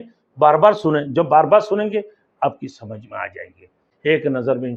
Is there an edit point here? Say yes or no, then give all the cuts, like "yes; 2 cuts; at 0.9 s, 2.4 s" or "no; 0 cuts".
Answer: yes; 1 cut; at 3.8 s